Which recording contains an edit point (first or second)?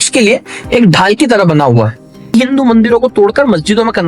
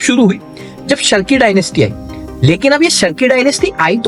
first